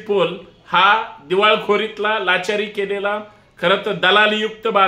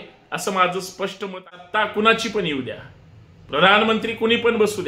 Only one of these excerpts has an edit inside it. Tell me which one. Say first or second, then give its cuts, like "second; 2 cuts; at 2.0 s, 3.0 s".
second; 1 cut; at 1.2 s